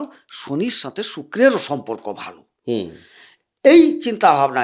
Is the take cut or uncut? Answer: uncut